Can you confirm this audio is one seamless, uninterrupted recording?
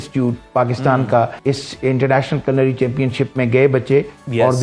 no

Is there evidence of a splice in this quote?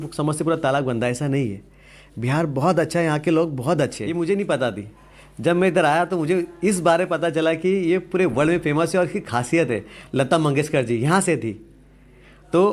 yes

